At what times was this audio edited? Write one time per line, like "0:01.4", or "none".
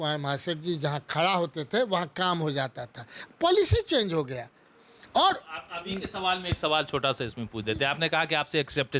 none

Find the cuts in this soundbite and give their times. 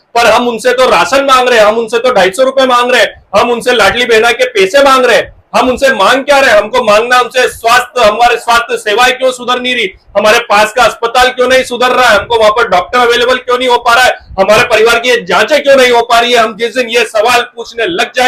none

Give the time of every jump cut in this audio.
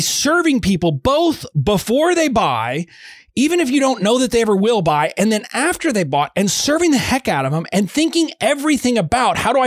none

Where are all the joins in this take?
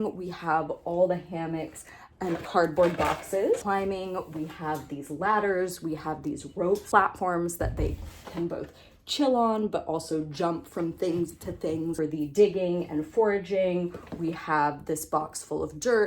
0:02.4
0:03.6
0:06.8
0:12.0

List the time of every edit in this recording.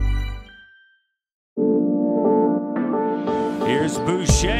0:01.6

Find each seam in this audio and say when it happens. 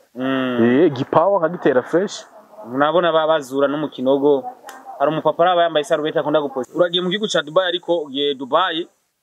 0:06.6

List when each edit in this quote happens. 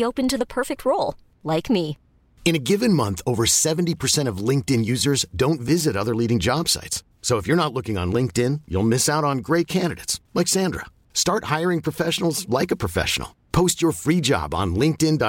none

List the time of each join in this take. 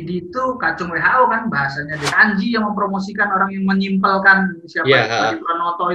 0:02.1

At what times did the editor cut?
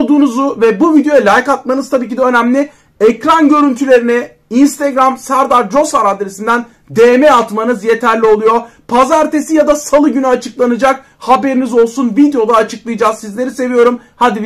none

